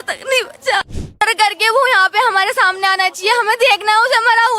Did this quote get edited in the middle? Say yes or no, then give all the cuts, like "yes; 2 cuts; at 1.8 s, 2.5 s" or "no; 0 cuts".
yes; 1 cut; at 1.2 s